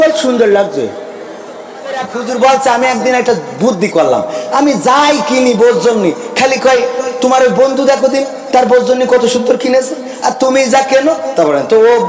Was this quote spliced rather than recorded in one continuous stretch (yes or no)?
yes